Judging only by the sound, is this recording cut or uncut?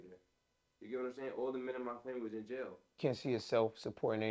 cut